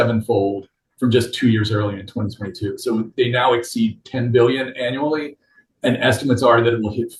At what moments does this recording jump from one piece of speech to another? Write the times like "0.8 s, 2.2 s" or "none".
none